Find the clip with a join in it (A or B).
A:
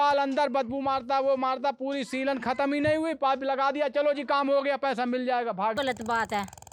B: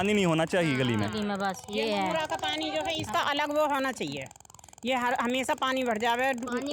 A